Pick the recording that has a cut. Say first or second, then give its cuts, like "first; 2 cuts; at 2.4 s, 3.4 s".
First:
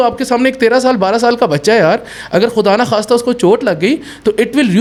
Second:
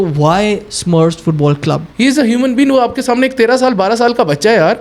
second; 1 cut; at 1.9 s